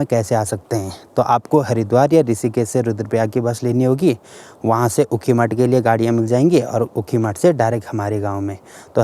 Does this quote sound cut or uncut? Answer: uncut